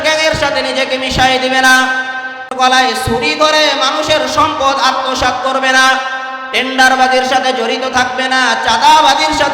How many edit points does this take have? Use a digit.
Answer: 1